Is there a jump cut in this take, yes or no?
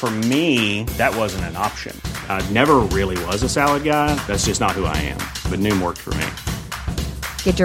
no